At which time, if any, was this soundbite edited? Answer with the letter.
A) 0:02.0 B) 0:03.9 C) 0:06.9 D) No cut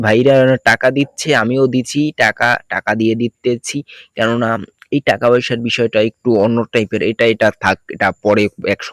D